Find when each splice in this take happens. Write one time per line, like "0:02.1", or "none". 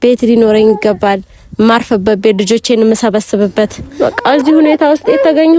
0:03.8